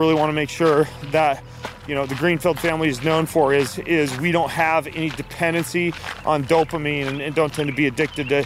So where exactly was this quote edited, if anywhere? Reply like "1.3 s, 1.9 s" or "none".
none